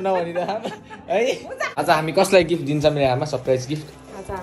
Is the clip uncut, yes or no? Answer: no